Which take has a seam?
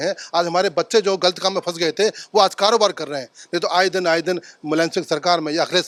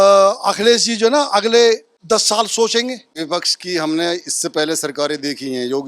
second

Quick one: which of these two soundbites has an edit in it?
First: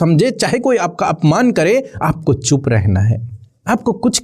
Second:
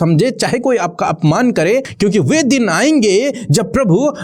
second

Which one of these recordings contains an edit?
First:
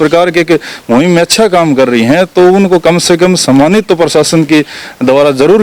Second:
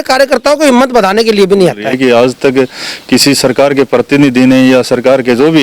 second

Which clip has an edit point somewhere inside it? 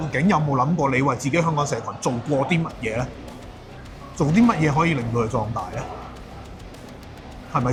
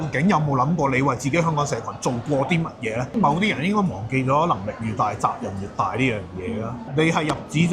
second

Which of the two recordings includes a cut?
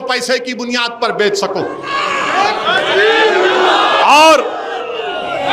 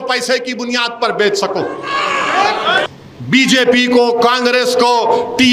second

